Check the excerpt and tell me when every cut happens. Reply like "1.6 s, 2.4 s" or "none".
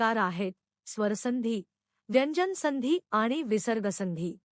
none